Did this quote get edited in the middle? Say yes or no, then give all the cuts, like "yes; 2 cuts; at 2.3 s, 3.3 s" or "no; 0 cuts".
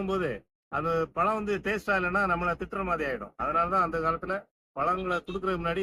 no; 0 cuts